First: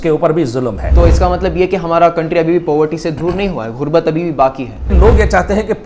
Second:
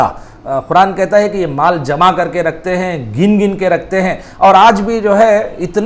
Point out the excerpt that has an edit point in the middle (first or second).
first